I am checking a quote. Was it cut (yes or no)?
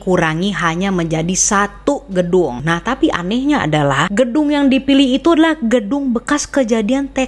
yes